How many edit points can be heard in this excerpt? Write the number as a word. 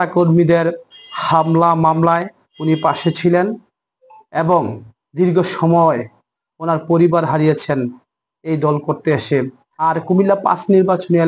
one